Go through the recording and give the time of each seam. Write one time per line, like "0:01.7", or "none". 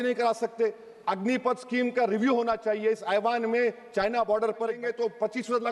0:04.8